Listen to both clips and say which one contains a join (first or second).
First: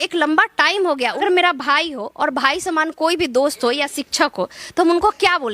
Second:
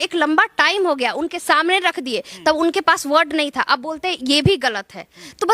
first